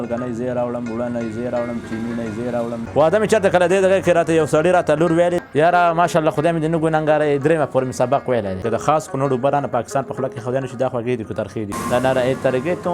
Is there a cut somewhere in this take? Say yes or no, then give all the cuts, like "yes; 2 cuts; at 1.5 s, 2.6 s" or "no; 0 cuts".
yes; 4 cuts; at 2.8 s, 5.4 s, 8.6 s, 11.8 s